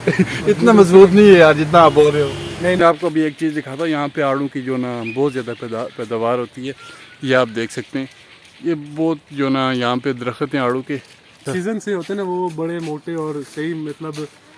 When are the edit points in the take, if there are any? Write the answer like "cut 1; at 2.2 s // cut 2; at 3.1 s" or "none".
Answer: cut 1; at 2.8 s // cut 2; at 11.7 s